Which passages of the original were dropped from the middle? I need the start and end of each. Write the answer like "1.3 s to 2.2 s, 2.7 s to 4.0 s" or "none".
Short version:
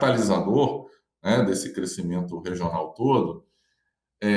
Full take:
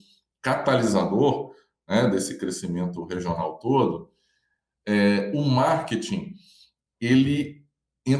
none